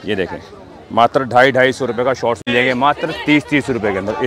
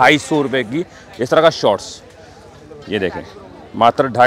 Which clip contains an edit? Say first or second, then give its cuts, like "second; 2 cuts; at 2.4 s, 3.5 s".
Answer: first; 1 cut; at 2.5 s